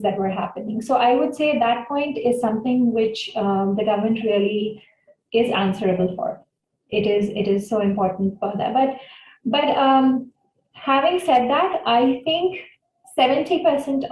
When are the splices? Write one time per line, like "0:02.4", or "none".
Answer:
none